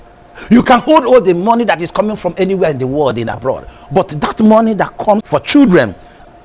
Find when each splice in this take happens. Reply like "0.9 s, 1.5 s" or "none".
5.2 s